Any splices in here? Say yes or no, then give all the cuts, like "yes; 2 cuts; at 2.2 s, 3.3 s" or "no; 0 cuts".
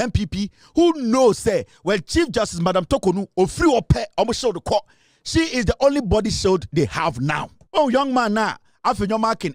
yes; 1 cut; at 7.5 s